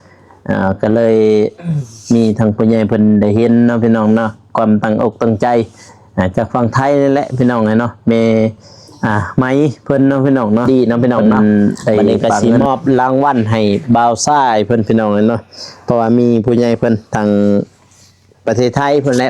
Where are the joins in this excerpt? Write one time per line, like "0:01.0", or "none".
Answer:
0:12.2